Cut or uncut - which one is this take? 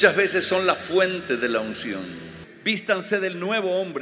cut